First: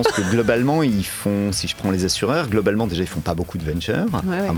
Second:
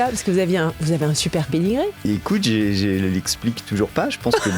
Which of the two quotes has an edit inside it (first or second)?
second